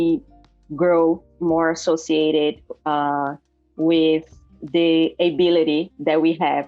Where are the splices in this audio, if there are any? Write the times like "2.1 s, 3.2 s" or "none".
none